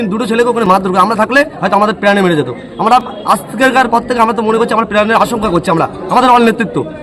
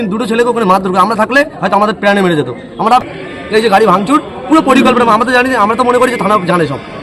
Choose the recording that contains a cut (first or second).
second